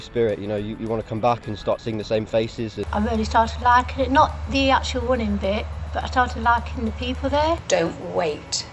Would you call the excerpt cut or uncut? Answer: cut